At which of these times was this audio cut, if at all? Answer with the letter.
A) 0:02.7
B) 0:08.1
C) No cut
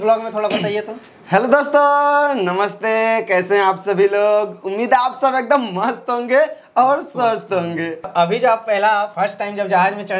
B